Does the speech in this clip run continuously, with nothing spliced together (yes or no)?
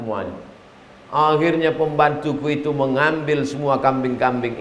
yes